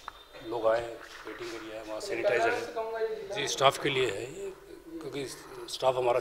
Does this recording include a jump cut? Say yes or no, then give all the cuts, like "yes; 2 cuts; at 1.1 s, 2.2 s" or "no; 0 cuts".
yes; 1 cut; at 3.4 s